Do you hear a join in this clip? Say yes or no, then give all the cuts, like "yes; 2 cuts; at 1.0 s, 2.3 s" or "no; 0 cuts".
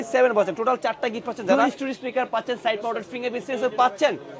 yes; 1 cut; at 1.6 s